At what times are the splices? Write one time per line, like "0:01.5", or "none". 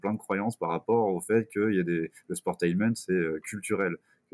none